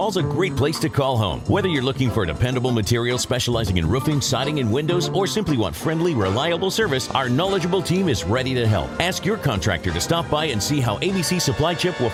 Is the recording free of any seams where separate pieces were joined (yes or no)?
yes